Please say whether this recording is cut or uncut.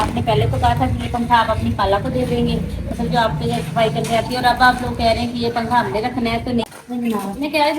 cut